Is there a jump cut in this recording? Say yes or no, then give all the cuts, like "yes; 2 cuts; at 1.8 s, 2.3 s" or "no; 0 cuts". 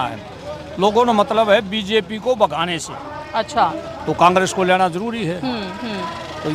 no; 0 cuts